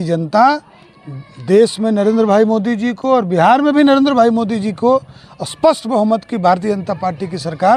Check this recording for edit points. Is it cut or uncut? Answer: uncut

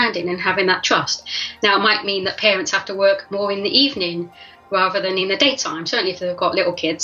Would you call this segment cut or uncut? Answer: uncut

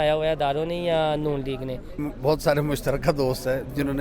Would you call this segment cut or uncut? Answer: cut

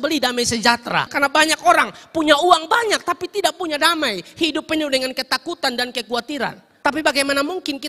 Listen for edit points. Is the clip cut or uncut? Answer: cut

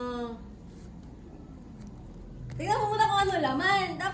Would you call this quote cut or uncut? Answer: uncut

